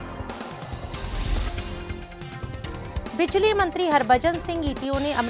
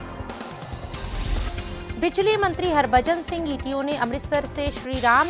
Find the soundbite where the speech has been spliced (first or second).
second